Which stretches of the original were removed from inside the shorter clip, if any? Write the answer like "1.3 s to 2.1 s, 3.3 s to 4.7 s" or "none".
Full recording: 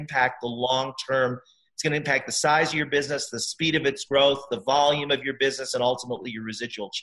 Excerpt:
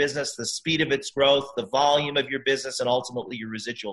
none